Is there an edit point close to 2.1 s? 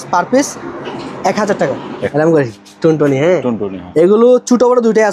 yes; 1 cut; at 2.1 s

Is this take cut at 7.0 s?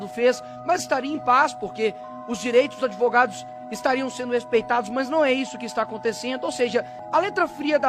yes; 1 cut; at 7.0 s

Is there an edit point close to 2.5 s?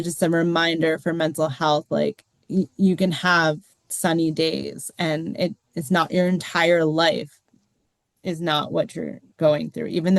no; 1 cut; at 9.2 s

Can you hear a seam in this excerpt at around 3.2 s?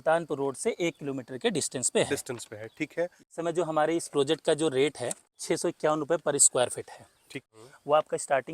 yes; 3 cuts; at 3.2 s, 5.4 s, 7.5 s

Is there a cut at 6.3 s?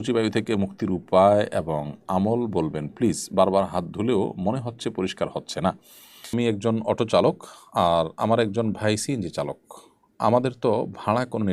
yes; 1 cut; at 6.3 s

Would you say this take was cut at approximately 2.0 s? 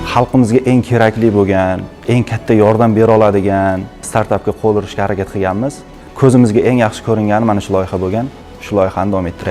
yes; 1 cut; at 2.0 s

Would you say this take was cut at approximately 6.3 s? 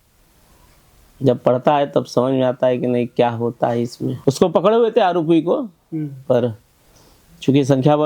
no; 1 cut; at 4.1 s

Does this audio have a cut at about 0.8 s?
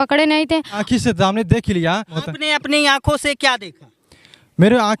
yes; 2 cuts; at 0.8 s, 2.2 s

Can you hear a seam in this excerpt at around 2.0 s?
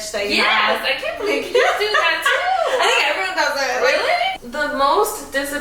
no; 1 cut; at 4.4 s

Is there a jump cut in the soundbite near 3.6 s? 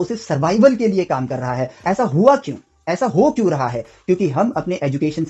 no; 1 cut; at 1.8 s

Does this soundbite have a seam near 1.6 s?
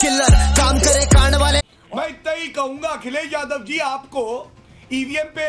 yes; 1 cut; at 1.6 s

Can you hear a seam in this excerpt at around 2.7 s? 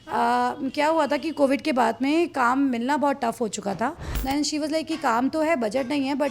no; 1 cut; at 4.1 s

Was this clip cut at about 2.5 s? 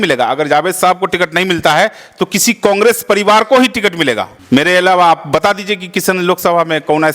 no; 1 cut; at 4.3 s

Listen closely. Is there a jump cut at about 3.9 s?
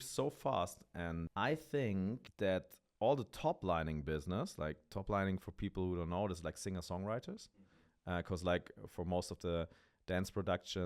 no; 2 cuts; at 1.2 s, 2.3 s

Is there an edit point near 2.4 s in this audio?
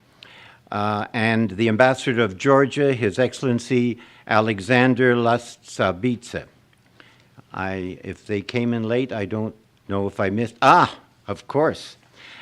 yes; 1 cut; at 2.4 s

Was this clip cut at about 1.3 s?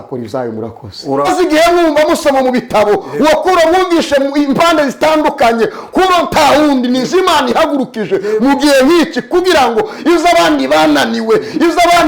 yes; 1 cut; at 1.3 s

